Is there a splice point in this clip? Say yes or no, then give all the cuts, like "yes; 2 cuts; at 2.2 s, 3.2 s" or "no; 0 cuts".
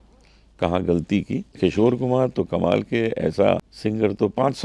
yes; 2 cuts; at 1.5 s, 3.7 s